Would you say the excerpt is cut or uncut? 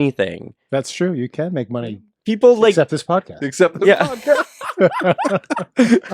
uncut